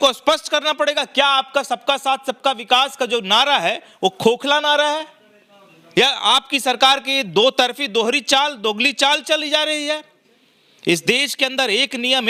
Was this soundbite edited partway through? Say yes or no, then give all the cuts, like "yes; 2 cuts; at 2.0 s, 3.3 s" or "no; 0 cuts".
no; 0 cuts